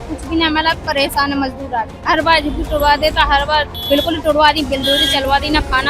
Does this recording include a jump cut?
yes; 2 cuts; at 1.9 s, 3.7 s

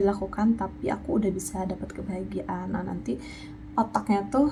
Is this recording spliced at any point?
no; 0 cuts

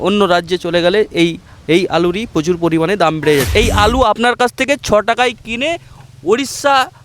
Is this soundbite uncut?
no; 1 cut; at 3.5 s

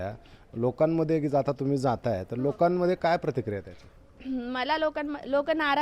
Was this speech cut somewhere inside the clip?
no; 0 cuts

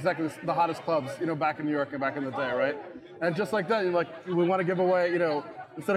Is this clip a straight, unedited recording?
yes; 0 cuts

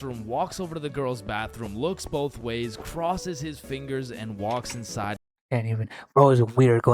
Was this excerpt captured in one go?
no; 1 cut; at 5.2 s

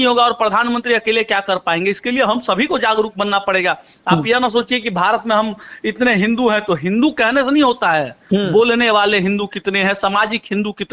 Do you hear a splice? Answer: no; 0 cuts

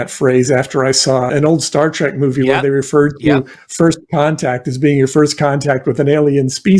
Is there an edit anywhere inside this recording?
yes; 1 cut; at 1.3 s

